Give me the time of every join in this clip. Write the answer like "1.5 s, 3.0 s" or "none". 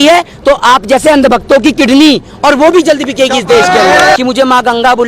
4.2 s

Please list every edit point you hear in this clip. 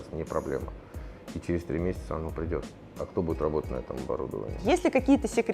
4.5 s

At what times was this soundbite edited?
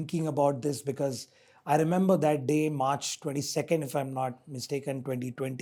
none

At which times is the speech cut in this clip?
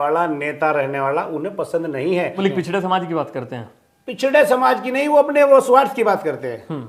2.4 s

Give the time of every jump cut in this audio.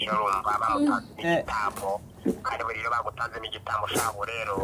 none

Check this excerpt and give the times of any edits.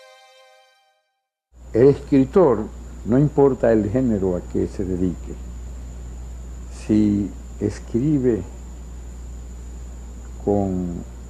none

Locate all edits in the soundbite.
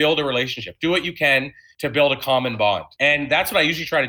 1.6 s, 2.9 s

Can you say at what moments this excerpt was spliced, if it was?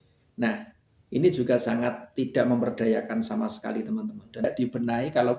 4.4 s

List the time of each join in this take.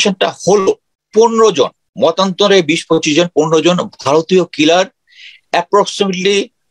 0.9 s, 1.8 s

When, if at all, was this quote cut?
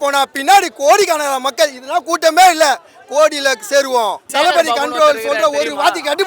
4.3 s

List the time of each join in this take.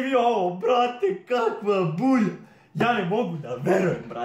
none

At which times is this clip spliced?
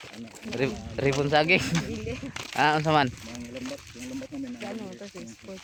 none

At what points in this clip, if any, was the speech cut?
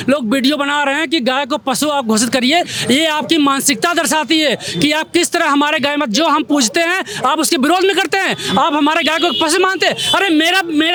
none

